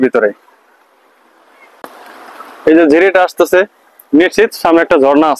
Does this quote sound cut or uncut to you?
uncut